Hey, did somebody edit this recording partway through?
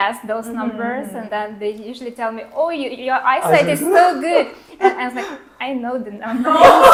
no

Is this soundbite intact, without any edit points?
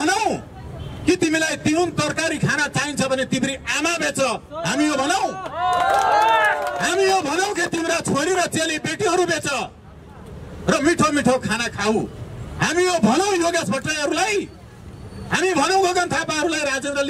yes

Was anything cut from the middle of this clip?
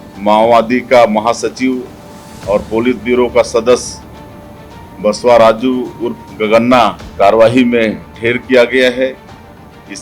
yes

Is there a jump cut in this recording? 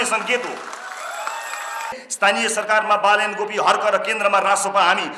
yes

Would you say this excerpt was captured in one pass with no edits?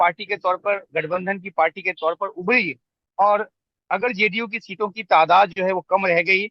yes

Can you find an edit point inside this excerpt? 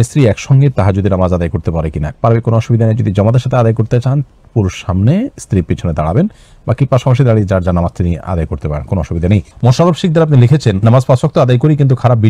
no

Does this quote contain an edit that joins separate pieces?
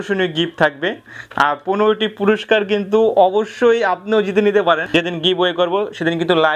yes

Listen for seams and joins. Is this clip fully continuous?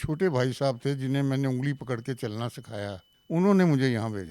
no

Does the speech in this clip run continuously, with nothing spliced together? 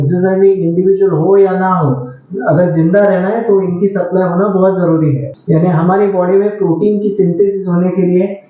no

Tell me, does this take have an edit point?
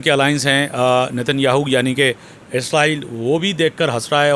no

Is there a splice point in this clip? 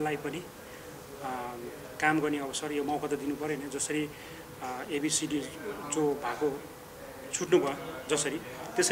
no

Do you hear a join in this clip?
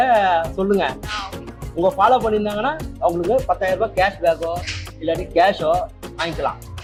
no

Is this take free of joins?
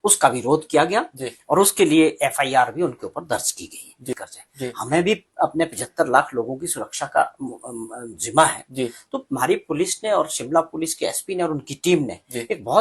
no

